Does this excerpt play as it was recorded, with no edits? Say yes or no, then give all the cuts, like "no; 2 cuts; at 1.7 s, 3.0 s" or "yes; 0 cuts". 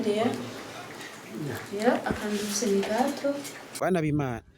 no; 1 cut; at 3.6 s